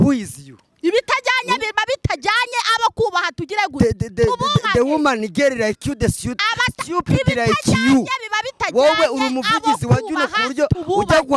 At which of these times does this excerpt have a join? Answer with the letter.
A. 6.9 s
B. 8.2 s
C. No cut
C